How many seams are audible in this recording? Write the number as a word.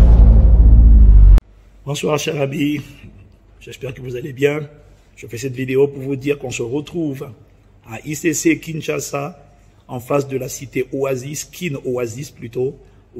one